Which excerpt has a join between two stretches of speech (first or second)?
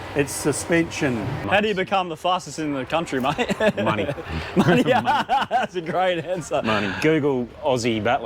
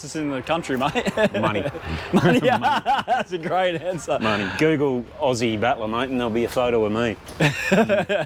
first